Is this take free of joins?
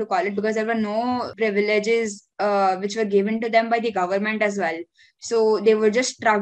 no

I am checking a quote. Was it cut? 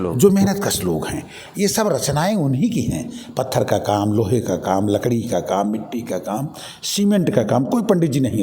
no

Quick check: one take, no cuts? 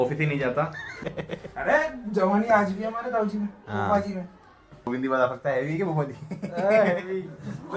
no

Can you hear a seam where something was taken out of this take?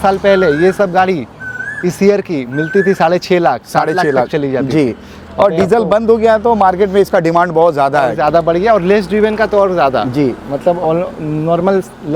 no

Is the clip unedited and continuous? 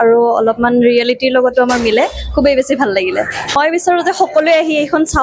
yes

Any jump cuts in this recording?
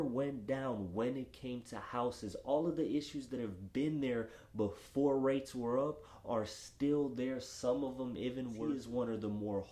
yes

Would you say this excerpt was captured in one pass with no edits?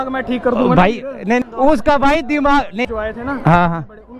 no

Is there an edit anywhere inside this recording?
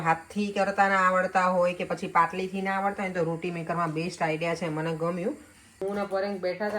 yes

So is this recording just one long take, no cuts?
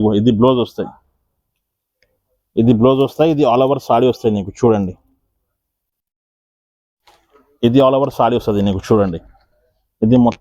yes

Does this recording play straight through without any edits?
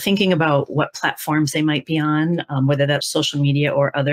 no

